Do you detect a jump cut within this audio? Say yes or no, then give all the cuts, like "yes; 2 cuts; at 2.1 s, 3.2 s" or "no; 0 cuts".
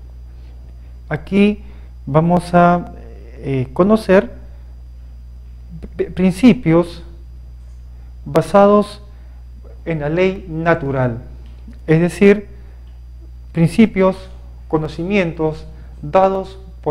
no; 0 cuts